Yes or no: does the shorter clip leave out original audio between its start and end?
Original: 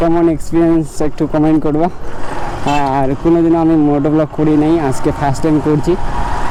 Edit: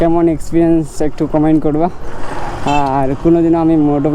no